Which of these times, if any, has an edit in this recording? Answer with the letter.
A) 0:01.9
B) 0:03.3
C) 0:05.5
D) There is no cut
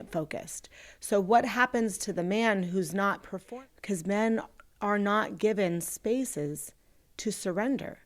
B